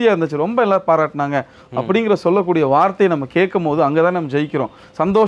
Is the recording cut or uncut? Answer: uncut